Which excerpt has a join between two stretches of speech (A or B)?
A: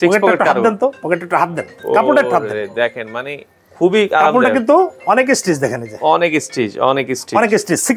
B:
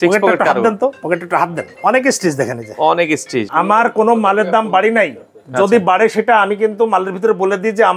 B